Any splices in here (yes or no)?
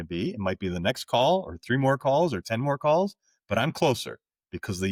no